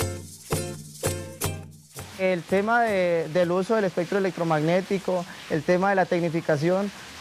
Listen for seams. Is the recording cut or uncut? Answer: cut